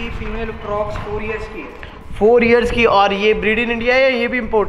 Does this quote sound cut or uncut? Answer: uncut